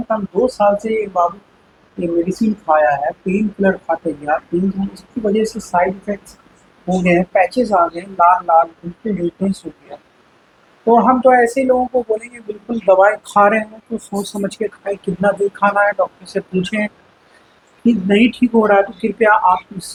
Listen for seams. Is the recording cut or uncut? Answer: uncut